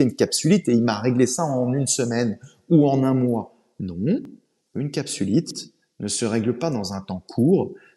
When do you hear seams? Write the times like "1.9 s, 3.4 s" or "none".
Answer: none